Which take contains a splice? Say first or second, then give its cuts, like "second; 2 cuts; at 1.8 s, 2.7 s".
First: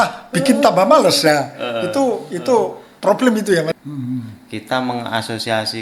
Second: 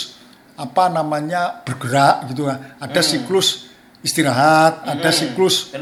first; 1 cut; at 3.7 s